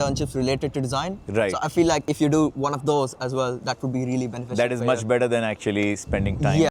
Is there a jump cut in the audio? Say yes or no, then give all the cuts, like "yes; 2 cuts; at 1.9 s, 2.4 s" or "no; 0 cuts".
no; 0 cuts